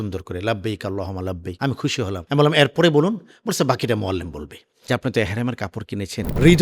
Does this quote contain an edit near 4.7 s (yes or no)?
yes